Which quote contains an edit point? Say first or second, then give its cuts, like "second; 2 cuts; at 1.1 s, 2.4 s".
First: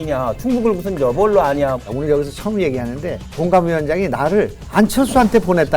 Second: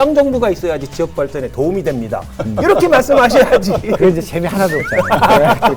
first; 3 cuts; at 1.8 s, 3.4 s, 4.6 s